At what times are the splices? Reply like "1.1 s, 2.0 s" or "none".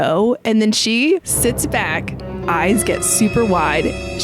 1.3 s

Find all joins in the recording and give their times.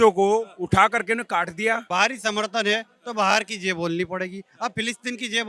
1.8 s

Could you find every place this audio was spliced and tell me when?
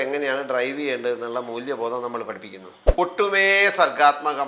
3.0 s

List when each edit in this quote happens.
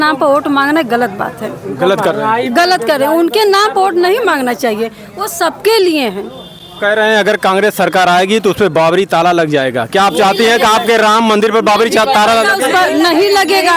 none

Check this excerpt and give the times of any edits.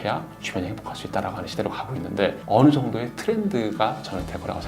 2.4 s

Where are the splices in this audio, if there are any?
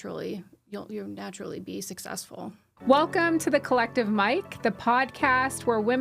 2.7 s

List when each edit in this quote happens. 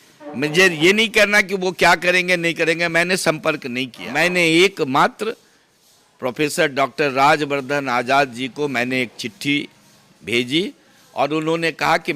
4.0 s

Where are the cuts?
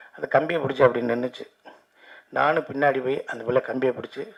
none

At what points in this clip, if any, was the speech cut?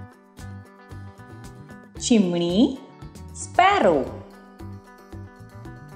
2.1 s, 4.2 s

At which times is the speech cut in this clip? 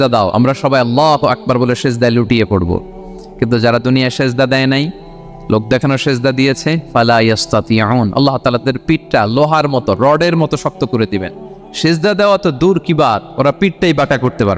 none

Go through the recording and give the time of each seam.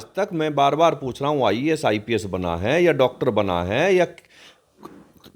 none

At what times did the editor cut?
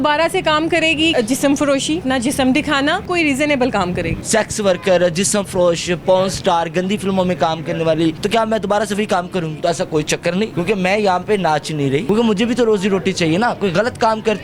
1.1 s, 2.0 s, 3.0 s, 4.2 s, 8.2 s, 9.6 s, 10.5 s, 12.0 s

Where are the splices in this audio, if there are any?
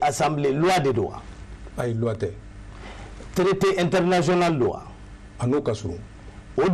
none

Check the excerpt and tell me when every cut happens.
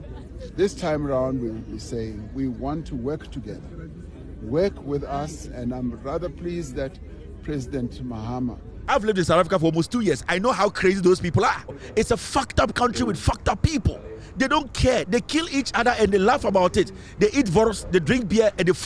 8.7 s, 11.8 s

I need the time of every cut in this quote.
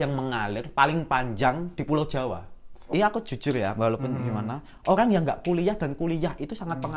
2.8 s

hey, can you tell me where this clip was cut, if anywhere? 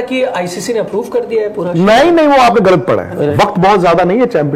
3.3 s

